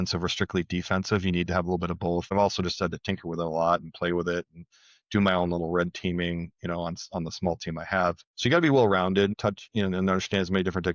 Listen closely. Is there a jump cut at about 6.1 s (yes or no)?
no